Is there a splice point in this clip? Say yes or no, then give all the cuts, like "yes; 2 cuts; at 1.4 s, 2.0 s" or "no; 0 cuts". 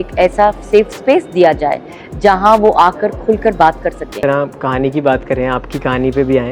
yes; 1 cut; at 4.1 s